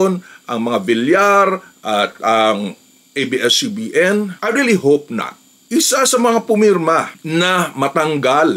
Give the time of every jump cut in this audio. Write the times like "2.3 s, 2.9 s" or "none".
4.3 s, 5.6 s